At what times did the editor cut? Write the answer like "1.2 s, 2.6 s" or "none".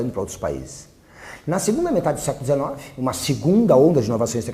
1.4 s